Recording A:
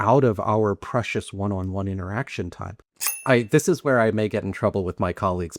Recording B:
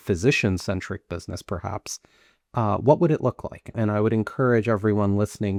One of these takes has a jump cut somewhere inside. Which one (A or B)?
A